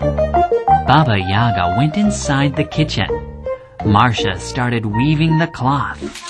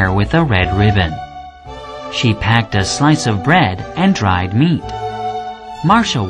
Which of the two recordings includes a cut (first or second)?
second